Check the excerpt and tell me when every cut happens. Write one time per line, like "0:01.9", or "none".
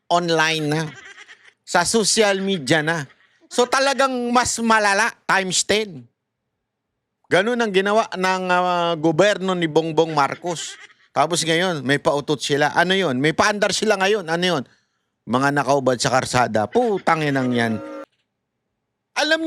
0:18.0

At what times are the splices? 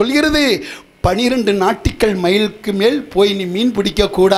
none

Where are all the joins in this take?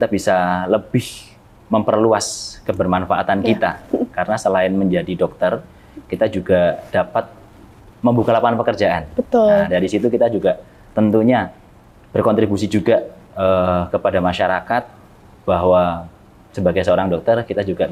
none

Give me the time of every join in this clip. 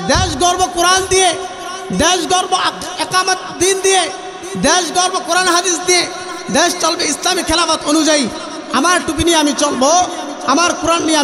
none

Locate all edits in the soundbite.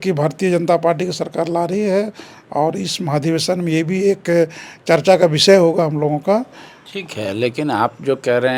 none

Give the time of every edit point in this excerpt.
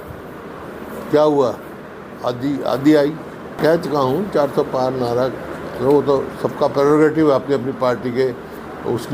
0:03.5

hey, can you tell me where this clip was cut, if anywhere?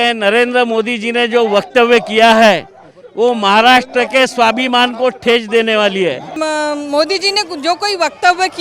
0:06.3

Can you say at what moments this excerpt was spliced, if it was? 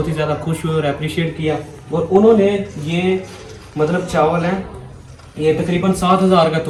none

